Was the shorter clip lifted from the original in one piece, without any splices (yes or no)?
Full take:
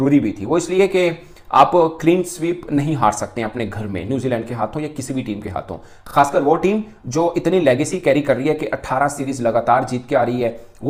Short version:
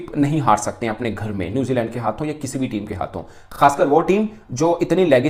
yes